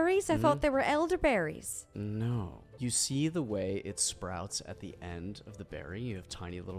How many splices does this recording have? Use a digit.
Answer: 1